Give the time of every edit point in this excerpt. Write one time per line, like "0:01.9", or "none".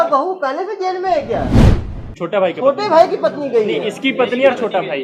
0:01.7